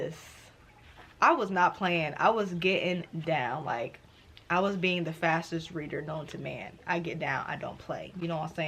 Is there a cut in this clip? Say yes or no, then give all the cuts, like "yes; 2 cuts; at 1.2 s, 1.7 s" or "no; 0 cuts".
no; 0 cuts